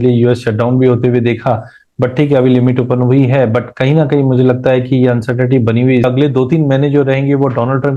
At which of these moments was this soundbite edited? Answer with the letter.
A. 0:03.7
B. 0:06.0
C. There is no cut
B